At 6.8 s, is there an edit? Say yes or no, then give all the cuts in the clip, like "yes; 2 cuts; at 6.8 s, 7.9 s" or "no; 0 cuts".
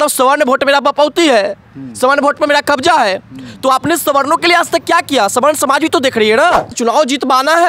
yes; 1 cut; at 6.8 s